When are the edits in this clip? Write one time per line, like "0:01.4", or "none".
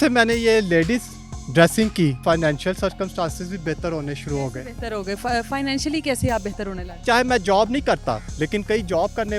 0:02.2
0:06.9
0:08.3